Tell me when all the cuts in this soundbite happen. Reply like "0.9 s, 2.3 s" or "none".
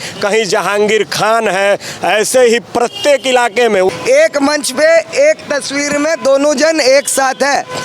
4.0 s